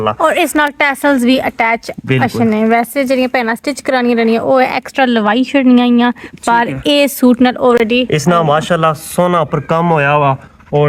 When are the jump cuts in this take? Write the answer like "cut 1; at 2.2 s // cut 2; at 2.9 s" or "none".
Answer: none

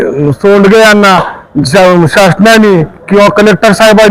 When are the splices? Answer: none

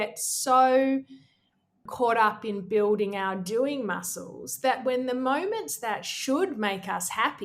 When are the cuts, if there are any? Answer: cut 1; at 1.8 s

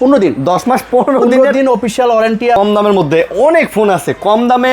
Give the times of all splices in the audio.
cut 1; at 2.6 s

